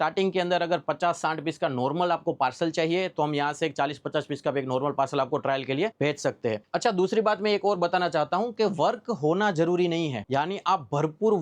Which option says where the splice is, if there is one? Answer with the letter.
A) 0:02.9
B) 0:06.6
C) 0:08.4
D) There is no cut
D